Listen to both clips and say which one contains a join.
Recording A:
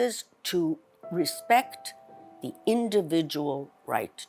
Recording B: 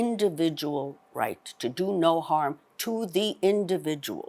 A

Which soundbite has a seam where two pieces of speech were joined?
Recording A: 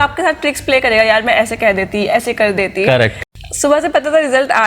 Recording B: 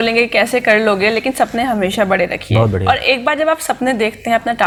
A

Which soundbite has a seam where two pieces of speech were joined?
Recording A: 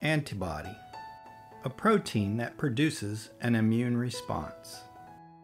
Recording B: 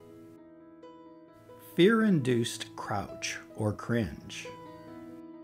B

